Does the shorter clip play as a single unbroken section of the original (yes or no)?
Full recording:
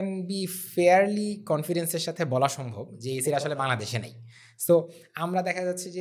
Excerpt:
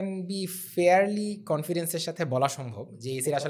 yes